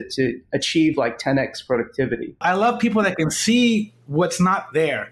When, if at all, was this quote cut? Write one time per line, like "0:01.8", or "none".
0:02.4